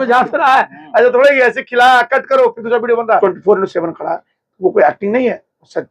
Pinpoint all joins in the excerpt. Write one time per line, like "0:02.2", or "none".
0:03.2

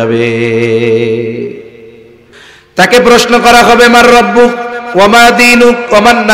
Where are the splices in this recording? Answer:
0:02.5

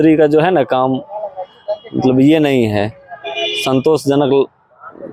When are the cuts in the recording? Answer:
none

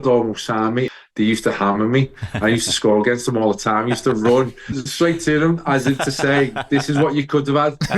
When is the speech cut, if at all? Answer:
0:00.9
0:04.8

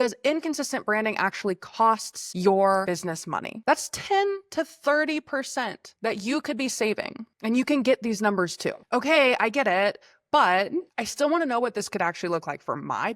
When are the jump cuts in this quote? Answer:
0:03.5
0:08.8

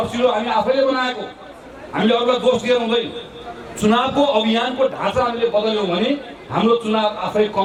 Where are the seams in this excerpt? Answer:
none

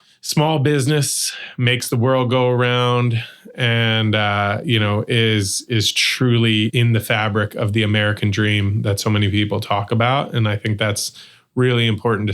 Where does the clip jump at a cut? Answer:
0:06.7

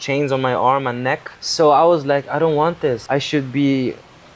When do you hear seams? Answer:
0:01.4
0:03.0

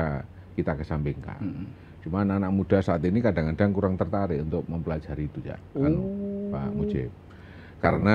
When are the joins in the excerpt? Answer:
none

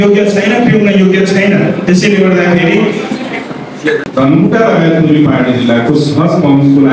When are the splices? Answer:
0:04.0

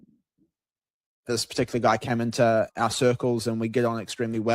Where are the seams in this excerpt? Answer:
0:01.2
0:02.7

